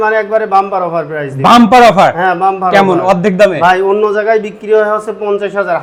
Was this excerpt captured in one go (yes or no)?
yes